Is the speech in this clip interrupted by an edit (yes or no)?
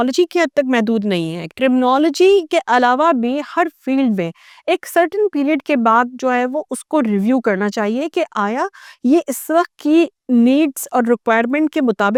no